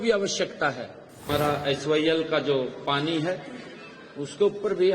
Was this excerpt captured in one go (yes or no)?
no